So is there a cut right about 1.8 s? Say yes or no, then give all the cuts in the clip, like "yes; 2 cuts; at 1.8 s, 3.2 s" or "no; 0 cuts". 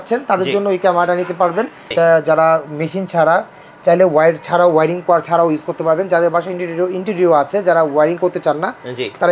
yes; 1 cut; at 1.8 s